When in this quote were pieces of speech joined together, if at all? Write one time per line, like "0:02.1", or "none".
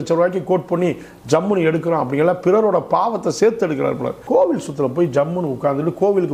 0:04.2